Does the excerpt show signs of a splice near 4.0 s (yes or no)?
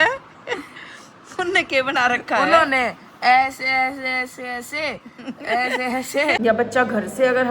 no